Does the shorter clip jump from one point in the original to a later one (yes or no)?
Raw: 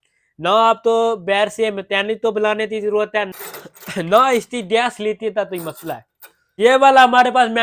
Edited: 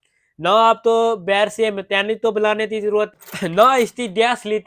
yes